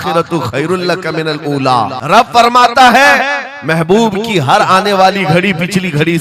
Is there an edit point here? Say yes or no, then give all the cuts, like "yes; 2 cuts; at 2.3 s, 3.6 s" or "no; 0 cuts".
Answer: yes; 1 cut; at 2.0 s